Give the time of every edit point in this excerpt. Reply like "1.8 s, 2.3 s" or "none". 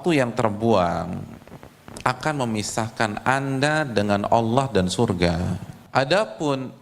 5.7 s